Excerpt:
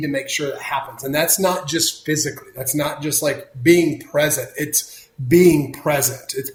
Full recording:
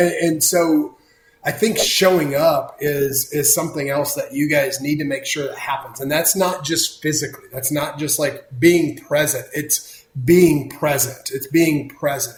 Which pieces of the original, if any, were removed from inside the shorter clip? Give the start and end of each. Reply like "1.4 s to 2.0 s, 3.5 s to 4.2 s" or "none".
none